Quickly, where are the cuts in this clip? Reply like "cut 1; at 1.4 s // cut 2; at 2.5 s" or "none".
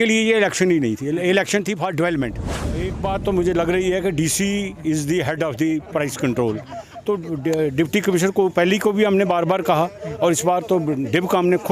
cut 1; at 2.7 s